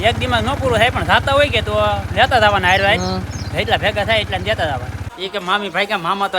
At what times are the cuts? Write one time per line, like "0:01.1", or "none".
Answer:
0:05.0